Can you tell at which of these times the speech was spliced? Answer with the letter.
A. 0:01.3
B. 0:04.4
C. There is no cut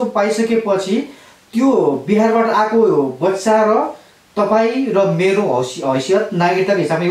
C